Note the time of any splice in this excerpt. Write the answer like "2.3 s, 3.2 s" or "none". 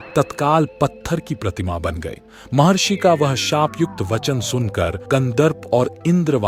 none